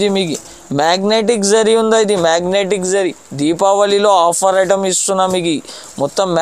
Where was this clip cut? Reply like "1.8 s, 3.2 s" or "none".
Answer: none